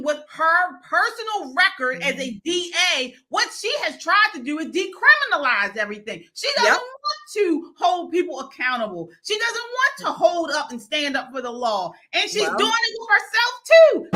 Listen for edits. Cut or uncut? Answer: uncut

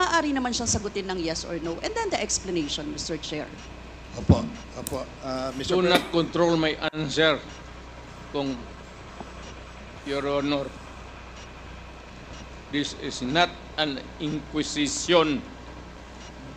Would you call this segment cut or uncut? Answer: uncut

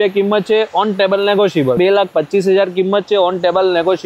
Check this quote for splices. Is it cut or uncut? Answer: cut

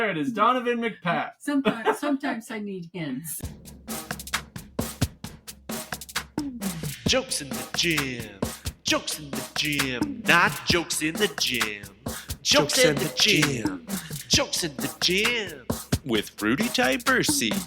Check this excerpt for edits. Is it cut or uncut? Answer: cut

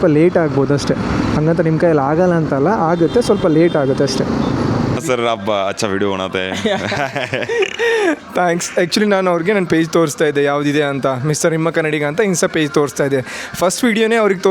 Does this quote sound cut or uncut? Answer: cut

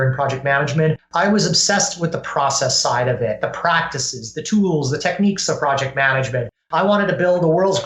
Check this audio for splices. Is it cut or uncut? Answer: cut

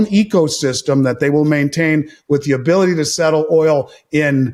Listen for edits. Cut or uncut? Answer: uncut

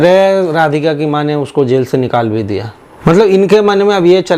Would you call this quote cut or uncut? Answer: cut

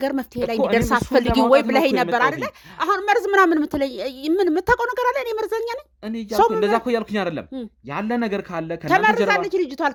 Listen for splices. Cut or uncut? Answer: uncut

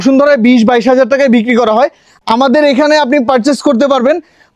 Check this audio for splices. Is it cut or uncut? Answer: uncut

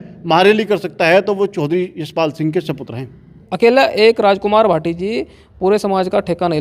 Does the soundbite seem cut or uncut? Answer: cut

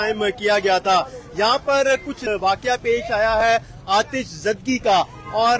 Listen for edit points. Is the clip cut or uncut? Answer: cut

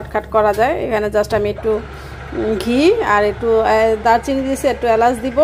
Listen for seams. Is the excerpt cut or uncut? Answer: uncut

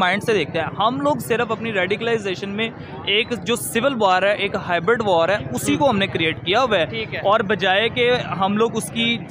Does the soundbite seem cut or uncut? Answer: uncut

